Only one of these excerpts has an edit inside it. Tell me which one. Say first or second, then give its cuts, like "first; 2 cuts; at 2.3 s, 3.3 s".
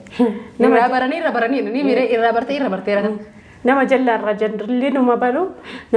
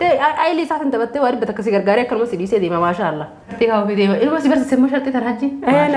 second; 1 cut; at 3.5 s